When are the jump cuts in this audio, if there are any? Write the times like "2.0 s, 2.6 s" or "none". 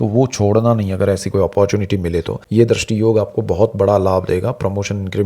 2.4 s

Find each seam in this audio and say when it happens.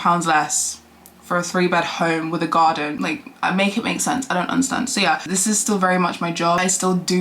5.2 s

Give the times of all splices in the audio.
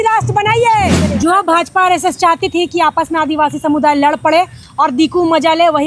1.0 s

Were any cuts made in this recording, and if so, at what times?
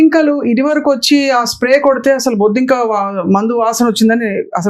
none

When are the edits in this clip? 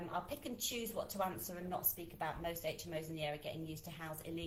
none

